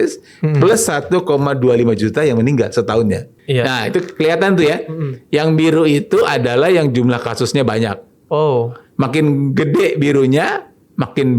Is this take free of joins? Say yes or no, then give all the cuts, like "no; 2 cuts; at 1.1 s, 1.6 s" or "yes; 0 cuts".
no; 1 cut; at 3.3 s